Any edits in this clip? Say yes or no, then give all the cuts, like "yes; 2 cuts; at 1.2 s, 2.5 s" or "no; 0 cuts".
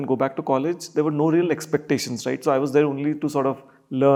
no; 0 cuts